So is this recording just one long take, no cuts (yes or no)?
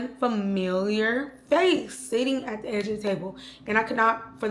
yes